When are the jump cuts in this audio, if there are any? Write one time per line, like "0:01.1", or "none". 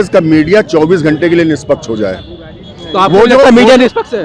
none